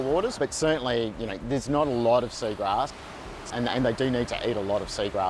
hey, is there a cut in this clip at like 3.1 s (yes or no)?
yes